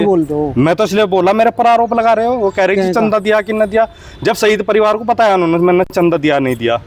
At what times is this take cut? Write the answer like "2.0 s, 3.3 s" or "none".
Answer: none